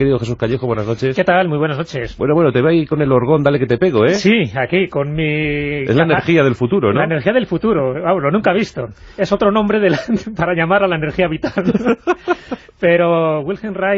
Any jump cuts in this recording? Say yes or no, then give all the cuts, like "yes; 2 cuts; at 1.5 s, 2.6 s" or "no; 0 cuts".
yes; 1 cut; at 5.3 s